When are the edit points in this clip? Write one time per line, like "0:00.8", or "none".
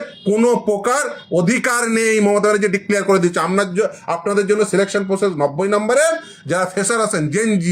none